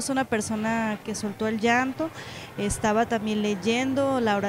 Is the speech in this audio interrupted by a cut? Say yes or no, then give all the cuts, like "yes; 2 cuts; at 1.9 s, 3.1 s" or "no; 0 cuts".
yes; 1 cut; at 1.0 s